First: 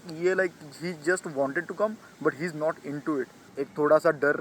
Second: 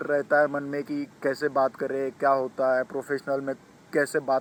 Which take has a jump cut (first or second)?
first